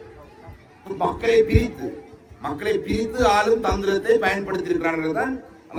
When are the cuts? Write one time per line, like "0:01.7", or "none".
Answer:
none